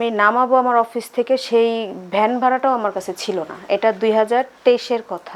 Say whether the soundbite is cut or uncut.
uncut